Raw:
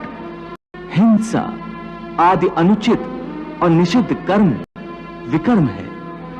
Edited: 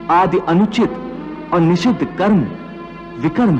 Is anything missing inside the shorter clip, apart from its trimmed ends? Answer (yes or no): no